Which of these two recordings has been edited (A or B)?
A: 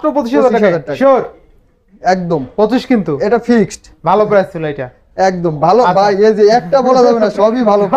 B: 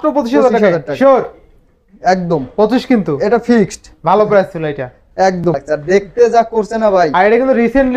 B